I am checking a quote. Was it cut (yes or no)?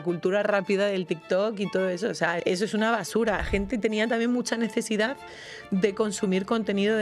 yes